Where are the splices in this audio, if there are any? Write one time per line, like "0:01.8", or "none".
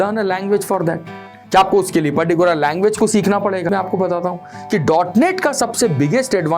0:03.7